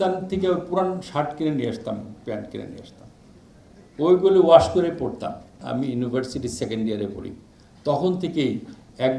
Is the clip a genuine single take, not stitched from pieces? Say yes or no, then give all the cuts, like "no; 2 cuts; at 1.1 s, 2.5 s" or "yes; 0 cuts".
no; 1 cut; at 5.6 s